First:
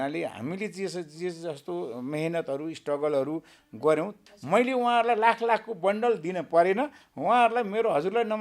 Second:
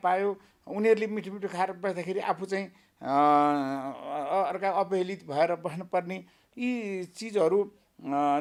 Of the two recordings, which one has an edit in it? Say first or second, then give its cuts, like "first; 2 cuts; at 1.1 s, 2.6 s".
first; 1 cut; at 4.2 s